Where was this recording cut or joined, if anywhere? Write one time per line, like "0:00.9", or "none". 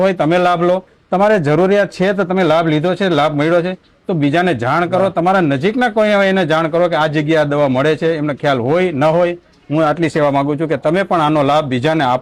none

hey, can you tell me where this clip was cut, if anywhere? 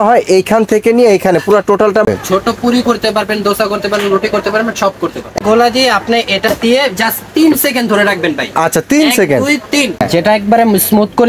0:02.1
0:05.4
0:10.1

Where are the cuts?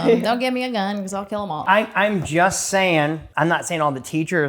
0:01.6
0:03.2

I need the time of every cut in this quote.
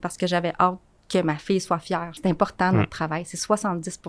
0:02.2

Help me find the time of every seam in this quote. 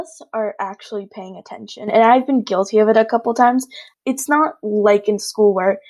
0:03.8

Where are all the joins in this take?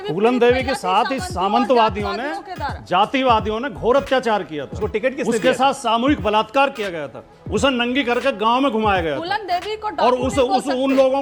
none

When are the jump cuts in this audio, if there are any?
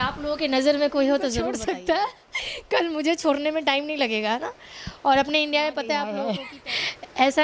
0:01.5
0:06.2

